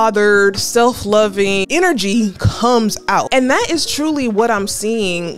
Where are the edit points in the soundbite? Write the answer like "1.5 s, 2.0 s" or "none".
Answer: 1.6 s, 3.3 s